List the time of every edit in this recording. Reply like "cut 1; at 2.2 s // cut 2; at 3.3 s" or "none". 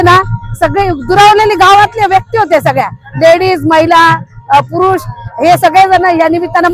none